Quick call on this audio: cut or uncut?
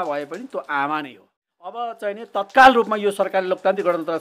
cut